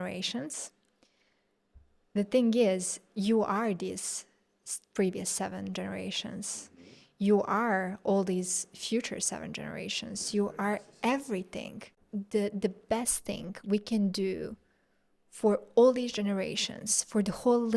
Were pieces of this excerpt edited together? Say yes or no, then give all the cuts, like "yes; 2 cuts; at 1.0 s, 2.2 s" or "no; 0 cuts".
yes; 1 cut; at 11.9 s